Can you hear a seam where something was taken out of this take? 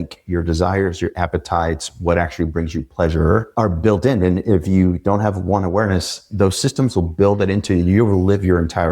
yes; 1 cut; at 3.5 s

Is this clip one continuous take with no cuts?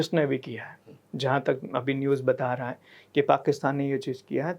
yes; 0 cuts

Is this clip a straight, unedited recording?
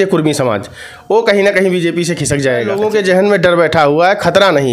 no; 1 cut; at 2.8 s

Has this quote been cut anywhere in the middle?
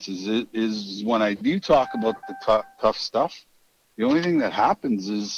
no; 0 cuts

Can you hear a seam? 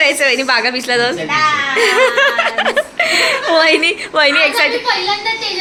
no; 0 cuts

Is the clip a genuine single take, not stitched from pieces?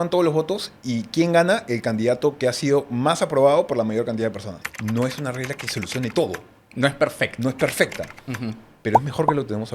no; 1 cut; at 4.6 s

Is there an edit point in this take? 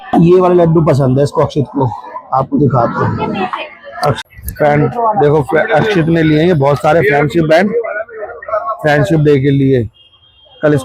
yes; 1 cut; at 4.2 s

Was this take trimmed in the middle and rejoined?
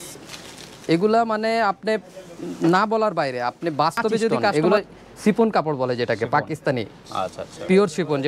yes; 1 cut; at 4.5 s

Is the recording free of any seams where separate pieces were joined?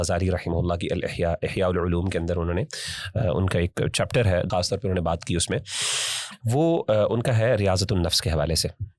no; 1 cut; at 4.5 s

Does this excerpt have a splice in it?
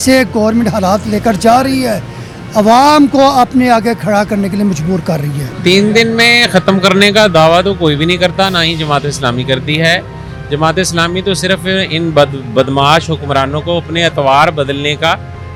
no; 0 cuts

